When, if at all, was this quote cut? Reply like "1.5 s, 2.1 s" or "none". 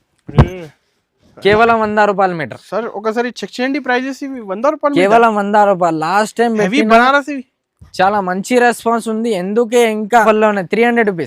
10.2 s